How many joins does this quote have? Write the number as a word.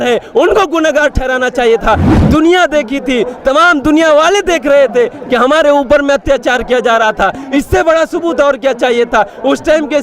one